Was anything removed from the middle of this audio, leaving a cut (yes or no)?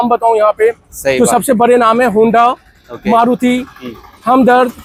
no